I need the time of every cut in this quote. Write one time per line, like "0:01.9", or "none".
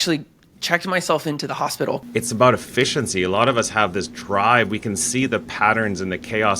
0:02.0